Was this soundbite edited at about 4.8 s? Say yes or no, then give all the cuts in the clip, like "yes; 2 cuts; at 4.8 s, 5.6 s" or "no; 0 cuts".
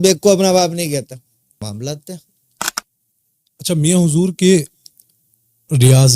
no; 1 cut; at 1.6 s